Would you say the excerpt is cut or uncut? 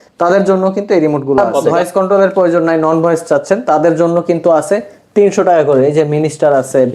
cut